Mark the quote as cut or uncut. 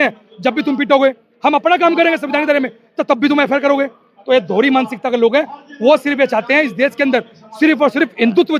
uncut